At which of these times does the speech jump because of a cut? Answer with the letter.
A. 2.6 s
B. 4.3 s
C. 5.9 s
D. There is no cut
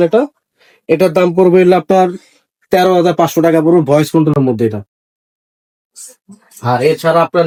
D